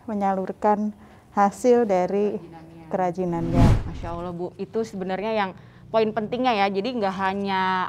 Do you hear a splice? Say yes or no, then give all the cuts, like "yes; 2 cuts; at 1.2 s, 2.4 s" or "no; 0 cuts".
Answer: no; 0 cuts